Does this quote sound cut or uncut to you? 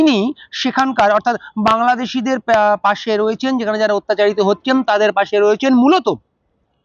uncut